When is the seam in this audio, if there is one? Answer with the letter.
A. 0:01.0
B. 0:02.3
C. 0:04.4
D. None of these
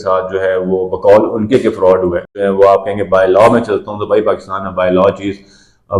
B